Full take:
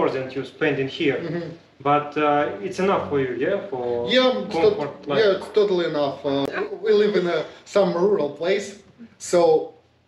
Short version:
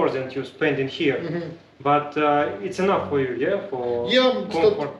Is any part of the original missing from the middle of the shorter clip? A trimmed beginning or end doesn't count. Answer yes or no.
no